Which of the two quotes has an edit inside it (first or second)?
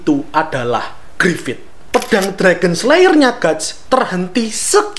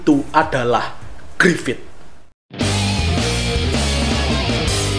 first